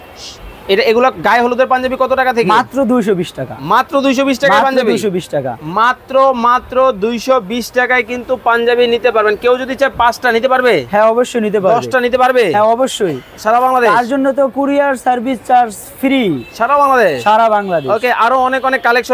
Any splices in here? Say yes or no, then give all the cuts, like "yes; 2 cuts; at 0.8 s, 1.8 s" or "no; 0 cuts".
no; 0 cuts